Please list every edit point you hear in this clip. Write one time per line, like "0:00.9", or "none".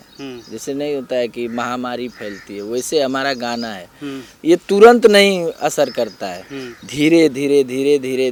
none